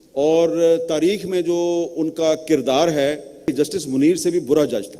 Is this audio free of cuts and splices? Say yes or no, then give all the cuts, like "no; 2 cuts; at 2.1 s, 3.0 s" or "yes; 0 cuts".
no; 1 cut; at 3.5 s